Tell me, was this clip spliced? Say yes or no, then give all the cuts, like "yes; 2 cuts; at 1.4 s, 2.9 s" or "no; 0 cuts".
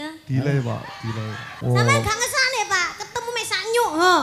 yes; 1 cut; at 1.4 s